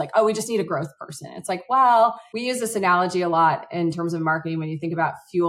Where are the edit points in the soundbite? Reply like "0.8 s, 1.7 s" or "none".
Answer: 2.3 s